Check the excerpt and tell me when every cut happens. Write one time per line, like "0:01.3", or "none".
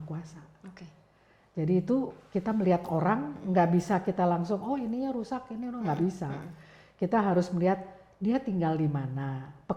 none